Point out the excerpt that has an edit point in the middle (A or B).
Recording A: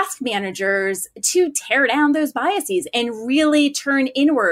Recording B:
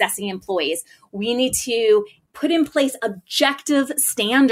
B